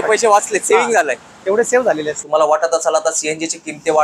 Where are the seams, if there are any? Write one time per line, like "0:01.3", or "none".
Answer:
0:02.2